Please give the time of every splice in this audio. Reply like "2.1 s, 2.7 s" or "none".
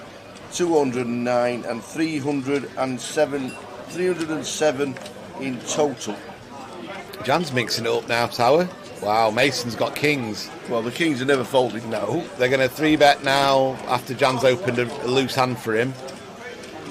none